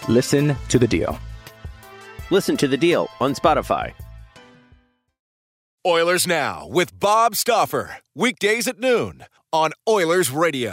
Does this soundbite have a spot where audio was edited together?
yes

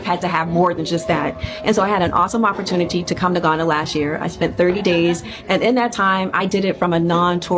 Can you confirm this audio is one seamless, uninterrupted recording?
yes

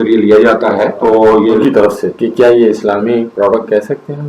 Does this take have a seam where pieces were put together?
yes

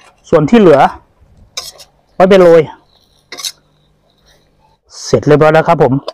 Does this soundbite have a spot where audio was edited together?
yes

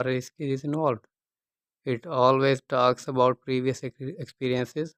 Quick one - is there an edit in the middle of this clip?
no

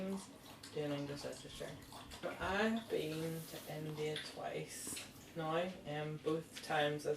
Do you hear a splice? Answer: yes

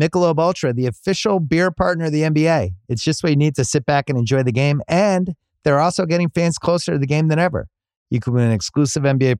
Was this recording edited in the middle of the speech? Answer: no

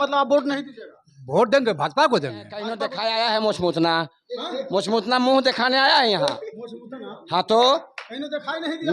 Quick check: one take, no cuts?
no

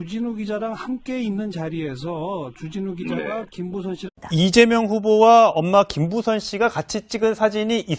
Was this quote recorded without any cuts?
yes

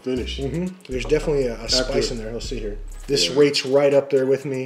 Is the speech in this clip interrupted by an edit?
yes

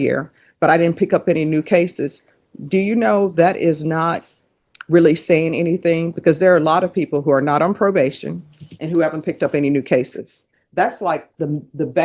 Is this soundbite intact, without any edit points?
yes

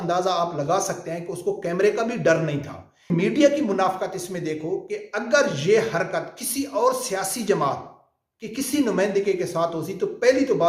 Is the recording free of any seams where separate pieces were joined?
no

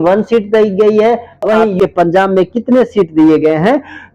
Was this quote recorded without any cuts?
no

